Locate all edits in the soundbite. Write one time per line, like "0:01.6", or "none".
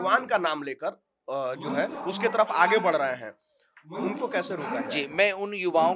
none